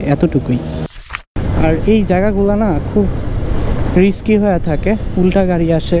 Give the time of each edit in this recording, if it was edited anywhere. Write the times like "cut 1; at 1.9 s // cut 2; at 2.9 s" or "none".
cut 1; at 1.3 s